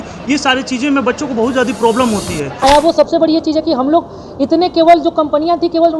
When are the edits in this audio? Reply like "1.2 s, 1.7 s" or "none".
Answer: 2.6 s